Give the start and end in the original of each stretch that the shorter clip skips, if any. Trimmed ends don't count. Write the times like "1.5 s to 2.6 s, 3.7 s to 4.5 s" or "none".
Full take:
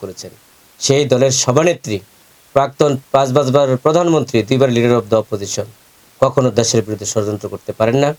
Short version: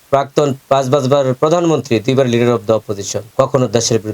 5.6 s to 6.0 s